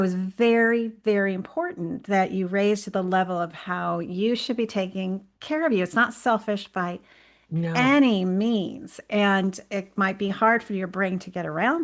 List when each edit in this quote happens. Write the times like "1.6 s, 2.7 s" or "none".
none

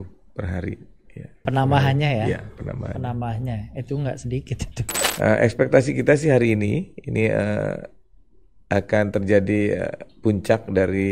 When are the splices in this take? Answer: 1.4 s, 5.1 s

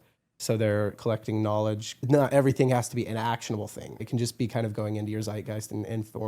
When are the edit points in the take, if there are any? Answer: 1.0 s, 2.1 s, 4.0 s

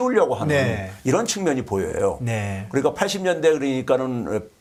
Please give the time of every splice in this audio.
none

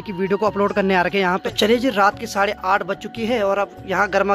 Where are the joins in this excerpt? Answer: 1.5 s

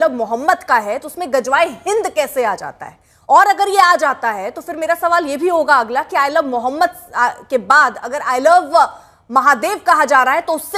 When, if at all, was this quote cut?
none

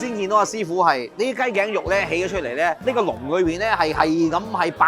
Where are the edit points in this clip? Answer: 1.1 s, 2.8 s

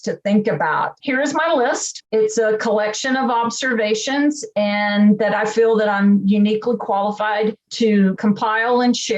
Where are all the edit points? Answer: 0.9 s, 1.9 s, 8.2 s

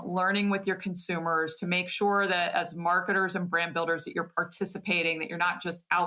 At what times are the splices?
none

